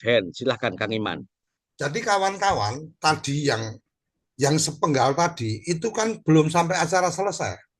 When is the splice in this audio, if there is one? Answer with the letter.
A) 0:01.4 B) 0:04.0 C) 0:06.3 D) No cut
A